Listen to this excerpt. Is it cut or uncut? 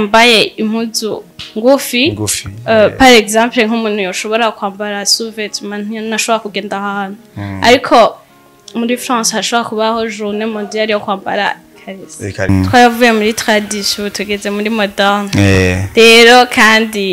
cut